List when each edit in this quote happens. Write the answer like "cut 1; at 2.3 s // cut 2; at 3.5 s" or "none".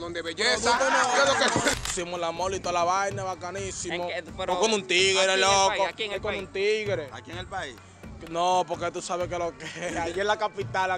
cut 1; at 1.8 s